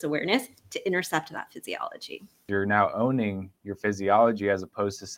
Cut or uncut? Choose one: cut